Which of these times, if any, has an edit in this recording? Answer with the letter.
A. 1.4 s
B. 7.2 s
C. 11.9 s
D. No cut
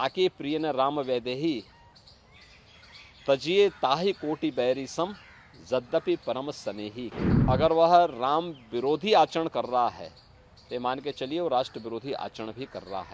B